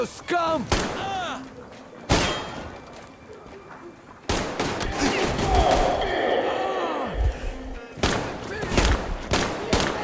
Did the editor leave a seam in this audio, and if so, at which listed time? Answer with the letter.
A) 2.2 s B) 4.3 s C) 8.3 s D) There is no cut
D